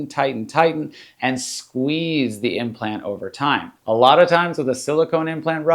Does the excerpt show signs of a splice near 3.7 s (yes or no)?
yes